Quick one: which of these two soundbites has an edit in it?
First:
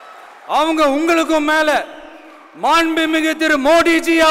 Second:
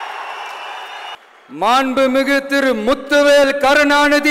second; 1 cut; at 1.2 s

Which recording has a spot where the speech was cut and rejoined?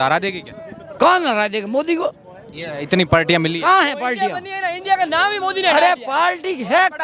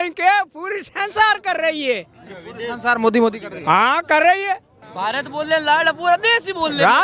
second; 1 cut; at 4.8 s

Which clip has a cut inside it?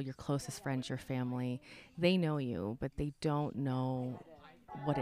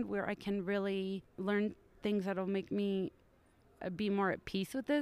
second; 1 cut; at 1.3 s

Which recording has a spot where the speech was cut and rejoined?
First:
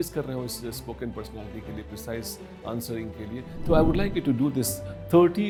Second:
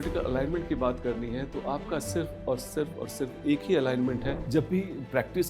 second; 1 cut; at 4.4 s

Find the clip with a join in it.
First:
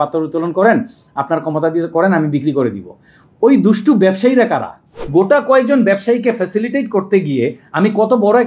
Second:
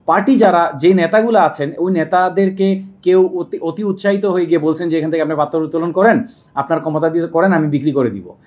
first; 1 cut; at 4.9 s

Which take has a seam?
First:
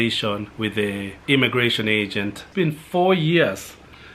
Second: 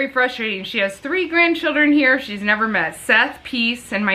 first; 2 cuts; at 1.0 s, 2.4 s

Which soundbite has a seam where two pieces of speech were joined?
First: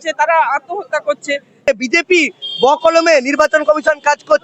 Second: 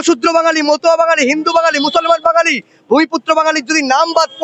first; 1 cut; at 1.7 s

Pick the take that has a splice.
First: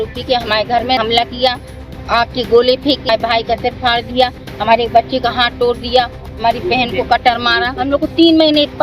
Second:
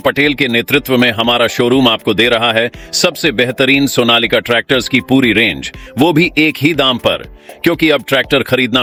first; 3 cuts; at 1.0 s, 3.0 s, 7.8 s

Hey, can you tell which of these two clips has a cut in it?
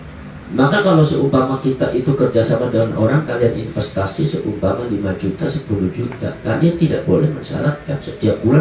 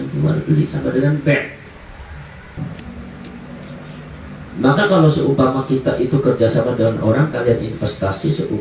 second; 1 cut; at 2.6 s

